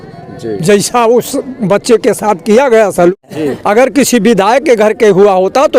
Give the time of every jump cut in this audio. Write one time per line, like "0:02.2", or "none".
0:03.1